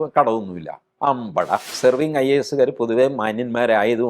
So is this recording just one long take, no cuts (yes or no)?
no